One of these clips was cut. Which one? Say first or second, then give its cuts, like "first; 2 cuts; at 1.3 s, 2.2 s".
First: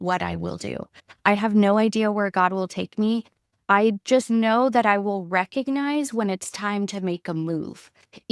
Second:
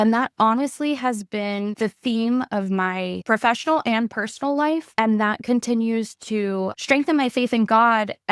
second; 4 cuts; at 1.7 s, 3.2 s, 4.9 s, 6.7 s